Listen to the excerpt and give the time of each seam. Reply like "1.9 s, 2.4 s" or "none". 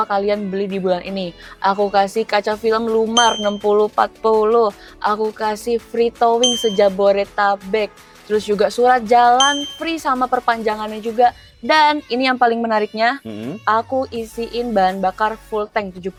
none